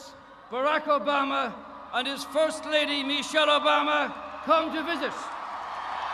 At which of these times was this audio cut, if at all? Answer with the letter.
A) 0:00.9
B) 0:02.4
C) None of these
C